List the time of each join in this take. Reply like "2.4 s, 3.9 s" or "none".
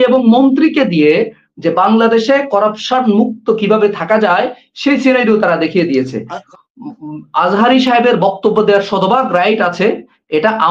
6.4 s